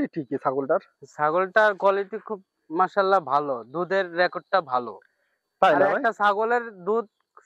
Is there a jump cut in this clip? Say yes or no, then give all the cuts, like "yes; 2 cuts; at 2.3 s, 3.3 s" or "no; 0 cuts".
no; 0 cuts